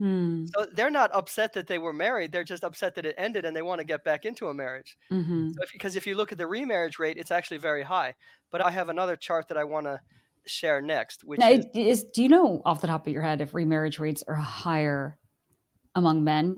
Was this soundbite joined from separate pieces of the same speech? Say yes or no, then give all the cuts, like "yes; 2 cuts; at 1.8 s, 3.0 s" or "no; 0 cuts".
no; 0 cuts